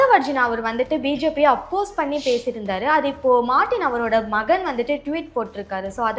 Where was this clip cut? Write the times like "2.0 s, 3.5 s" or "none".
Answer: none

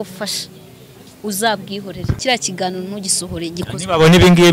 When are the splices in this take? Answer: 2.2 s

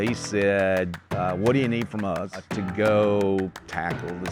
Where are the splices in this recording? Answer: 1.0 s, 2.5 s

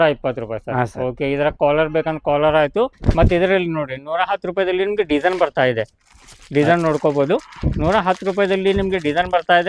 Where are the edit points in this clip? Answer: 3.0 s

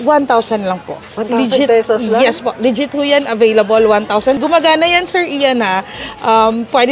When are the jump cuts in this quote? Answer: 4.4 s

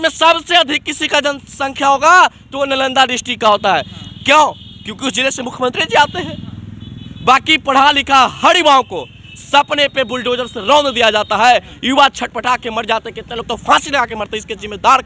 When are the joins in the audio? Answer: none

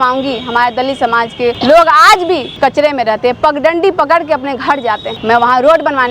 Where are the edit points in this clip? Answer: 1.6 s, 2.5 s, 5.1 s

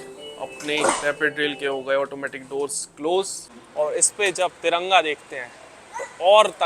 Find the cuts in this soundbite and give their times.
3.6 s

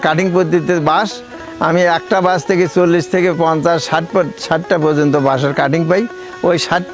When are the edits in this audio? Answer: none

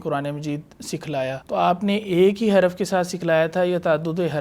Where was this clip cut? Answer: 1.4 s

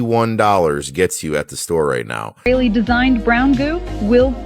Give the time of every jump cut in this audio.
2.5 s

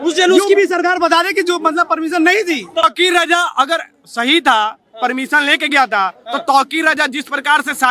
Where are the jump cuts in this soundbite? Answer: 2.8 s

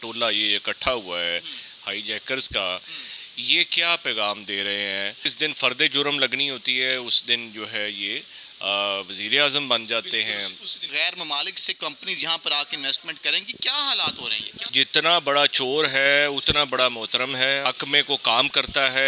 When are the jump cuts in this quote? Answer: 5.3 s, 10.9 s, 14.6 s, 17.6 s

